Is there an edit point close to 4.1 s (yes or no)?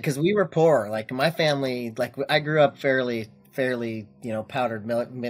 no